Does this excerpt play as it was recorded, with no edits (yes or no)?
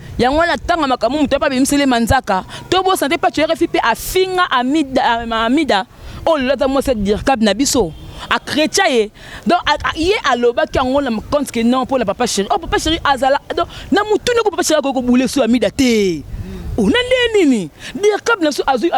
yes